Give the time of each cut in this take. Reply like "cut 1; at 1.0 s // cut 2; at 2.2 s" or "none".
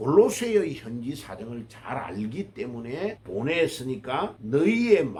none